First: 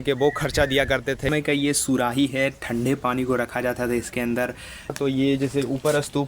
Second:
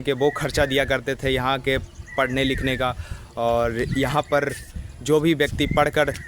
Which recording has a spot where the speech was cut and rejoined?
first; 2 cuts; at 1.3 s, 4.9 s

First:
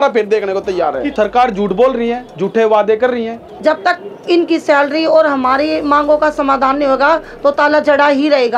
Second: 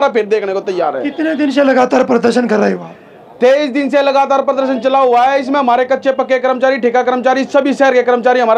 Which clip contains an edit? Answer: first; 2 cuts; at 1.1 s, 3.5 s

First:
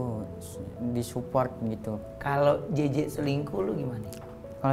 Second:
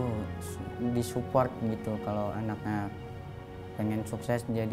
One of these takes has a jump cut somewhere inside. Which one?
first; 1 cut; at 2.0 s

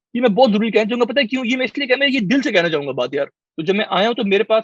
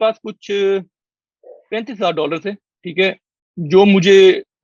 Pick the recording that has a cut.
first; 1 cut; at 3.4 s

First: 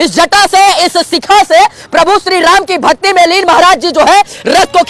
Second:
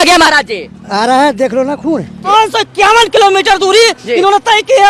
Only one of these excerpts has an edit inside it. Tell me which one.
second; 1 cut; at 2.3 s

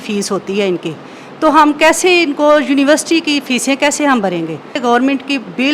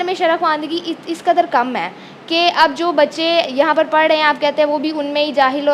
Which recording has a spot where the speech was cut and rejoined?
first; 1 cut; at 4.8 s

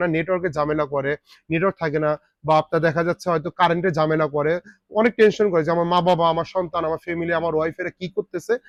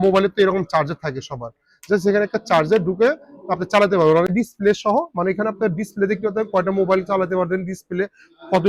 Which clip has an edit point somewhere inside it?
second; 1 cut; at 4.3 s

